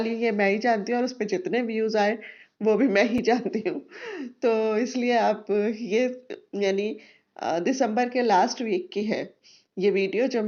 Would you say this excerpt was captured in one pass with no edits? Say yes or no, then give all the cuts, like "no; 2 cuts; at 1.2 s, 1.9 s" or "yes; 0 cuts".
yes; 0 cuts